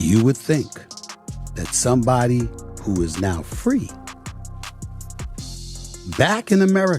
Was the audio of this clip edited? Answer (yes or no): yes